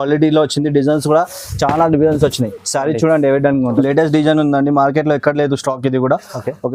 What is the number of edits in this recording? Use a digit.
1